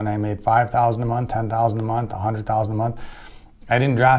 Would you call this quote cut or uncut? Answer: uncut